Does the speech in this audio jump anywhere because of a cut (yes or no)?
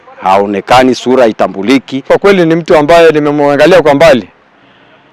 yes